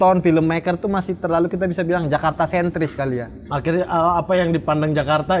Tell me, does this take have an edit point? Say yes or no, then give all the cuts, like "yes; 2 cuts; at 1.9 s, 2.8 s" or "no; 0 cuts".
no; 0 cuts